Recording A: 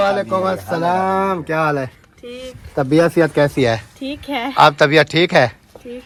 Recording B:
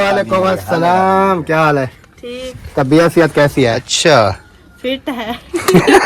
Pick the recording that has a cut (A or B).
B